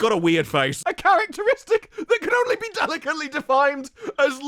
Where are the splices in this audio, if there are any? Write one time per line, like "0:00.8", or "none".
none